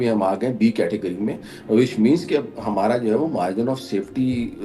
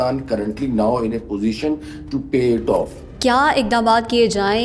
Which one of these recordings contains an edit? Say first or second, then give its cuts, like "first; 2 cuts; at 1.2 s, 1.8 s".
second; 1 cut; at 3.0 s